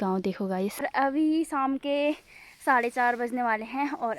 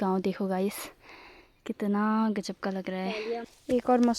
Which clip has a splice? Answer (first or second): first